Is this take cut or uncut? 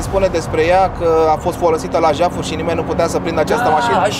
uncut